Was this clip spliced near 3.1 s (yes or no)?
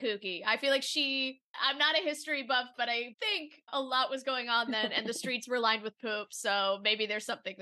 yes